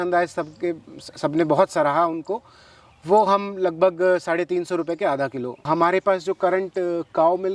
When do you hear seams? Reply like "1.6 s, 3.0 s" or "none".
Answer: 5.6 s

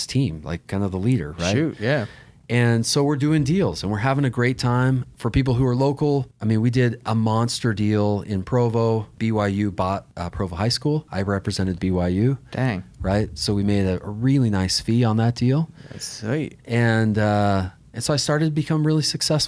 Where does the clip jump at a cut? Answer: 5.1 s, 6.3 s, 9.1 s, 10.2 s, 11.1 s

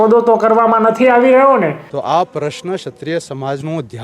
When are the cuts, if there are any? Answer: 1.8 s

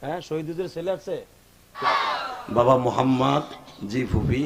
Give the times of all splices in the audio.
1.8 s

